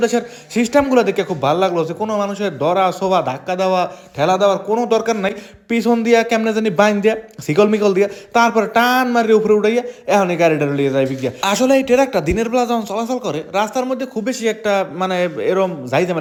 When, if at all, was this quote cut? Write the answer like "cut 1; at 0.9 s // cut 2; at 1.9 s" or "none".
none